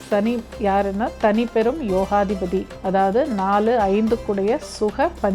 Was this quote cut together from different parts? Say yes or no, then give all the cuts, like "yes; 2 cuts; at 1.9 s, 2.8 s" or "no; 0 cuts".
no; 0 cuts